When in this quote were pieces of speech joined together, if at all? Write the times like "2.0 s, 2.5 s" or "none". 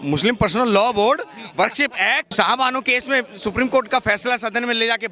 2.3 s